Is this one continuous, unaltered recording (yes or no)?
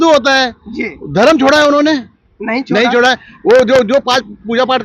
yes